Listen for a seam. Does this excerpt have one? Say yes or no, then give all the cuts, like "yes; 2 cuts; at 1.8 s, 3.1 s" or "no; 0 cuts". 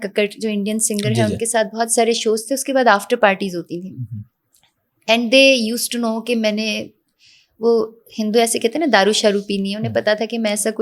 no; 0 cuts